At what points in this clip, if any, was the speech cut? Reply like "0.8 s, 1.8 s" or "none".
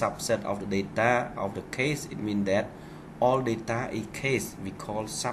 4.2 s